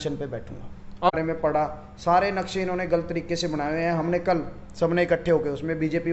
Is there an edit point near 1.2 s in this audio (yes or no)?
yes